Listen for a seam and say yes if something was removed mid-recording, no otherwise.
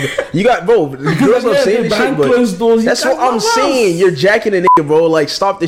no